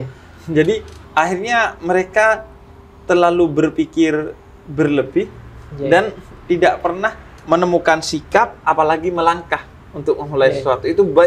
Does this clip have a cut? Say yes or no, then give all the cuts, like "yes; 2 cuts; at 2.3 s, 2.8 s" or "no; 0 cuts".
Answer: no; 0 cuts